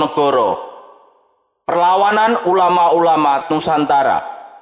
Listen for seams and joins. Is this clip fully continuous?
no; 1 cut; at 3.4 s

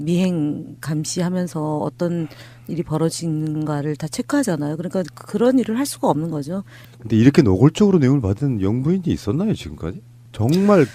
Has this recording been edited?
yes; 1 cut; at 6.8 s

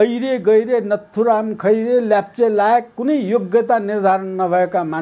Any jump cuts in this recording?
no; 0 cuts

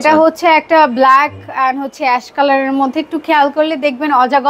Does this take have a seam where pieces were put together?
no; 0 cuts

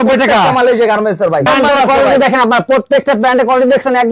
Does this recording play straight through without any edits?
no; 1 cut; at 1.5 s

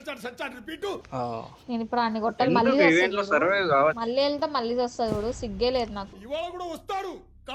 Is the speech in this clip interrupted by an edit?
yes; 2 cuts; at 4.0 s, 6.1 s

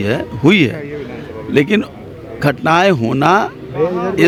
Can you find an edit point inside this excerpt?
no; 0 cuts

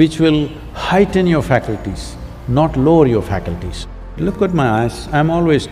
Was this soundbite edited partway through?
yes; 1 cut; at 4.1 s

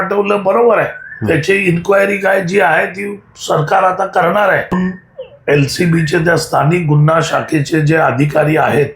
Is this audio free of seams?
no; 1 cut; at 4.7 s

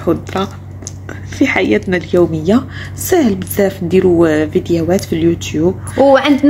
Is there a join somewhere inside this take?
no; 0 cuts

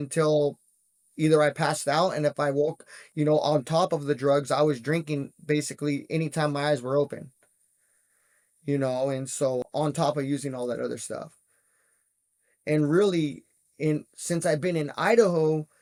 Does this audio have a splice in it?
no; 0 cuts

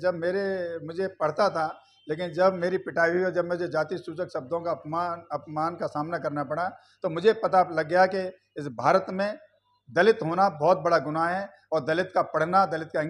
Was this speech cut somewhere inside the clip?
no; 0 cuts

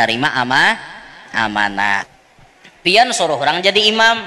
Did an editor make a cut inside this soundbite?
yes; 1 cut; at 2.0 s

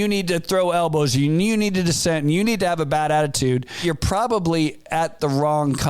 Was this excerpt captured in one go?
no; 1 cut; at 3.8 s

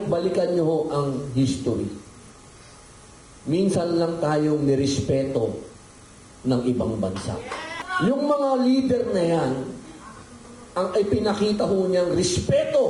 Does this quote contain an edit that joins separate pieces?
yes; 1 cut; at 7.8 s

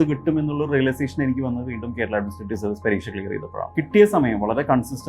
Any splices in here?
yes; 1 cut; at 3.7 s

